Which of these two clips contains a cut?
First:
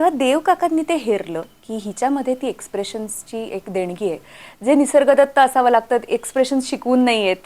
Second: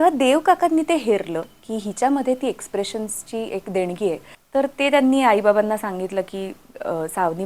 second; 1 cut; at 4.3 s

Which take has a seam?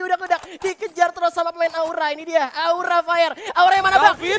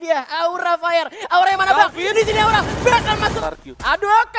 second; 1 cut; at 3.4 s

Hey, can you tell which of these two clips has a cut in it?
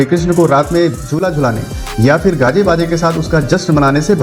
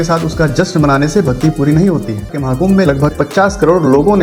second; 1 cut; at 2.4 s

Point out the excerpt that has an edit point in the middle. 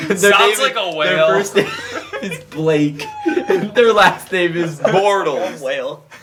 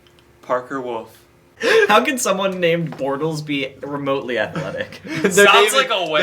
second; 1 cut; at 1.4 s

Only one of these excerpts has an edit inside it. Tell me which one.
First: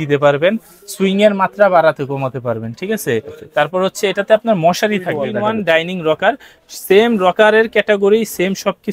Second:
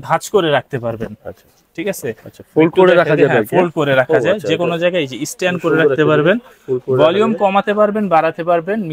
first; 1 cut; at 5.3 s

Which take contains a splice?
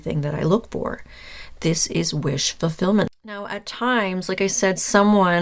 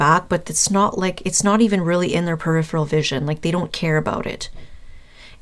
first; 1 cut; at 3.1 s

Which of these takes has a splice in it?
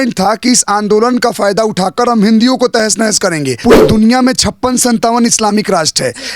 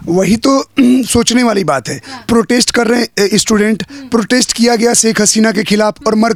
first; 1 cut; at 3.6 s

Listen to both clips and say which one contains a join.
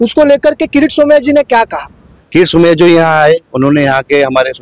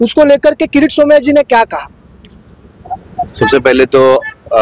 first; 1 cut; at 2.1 s

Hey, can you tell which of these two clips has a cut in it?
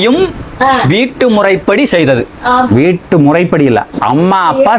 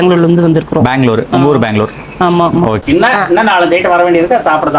second; 1 cut; at 2.8 s

